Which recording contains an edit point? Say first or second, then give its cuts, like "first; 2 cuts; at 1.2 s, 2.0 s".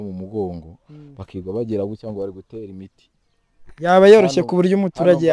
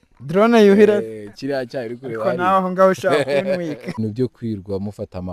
second; 1 cut; at 4.0 s